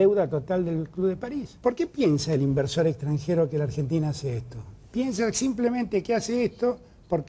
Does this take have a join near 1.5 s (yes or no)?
yes